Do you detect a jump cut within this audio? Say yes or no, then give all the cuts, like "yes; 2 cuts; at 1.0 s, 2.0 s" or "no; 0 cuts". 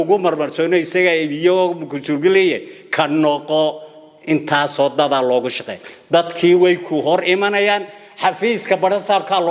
no; 0 cuts